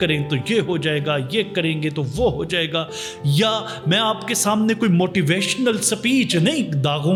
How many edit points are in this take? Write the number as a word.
zero